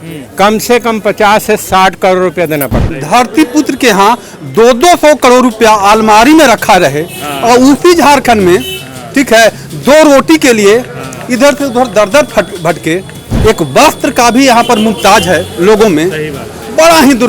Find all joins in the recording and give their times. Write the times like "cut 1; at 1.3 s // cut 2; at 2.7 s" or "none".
cut 1; at 2.8 s // cut 2; at 13.3 s